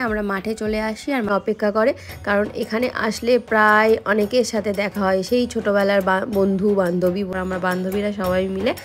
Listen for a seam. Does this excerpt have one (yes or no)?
yes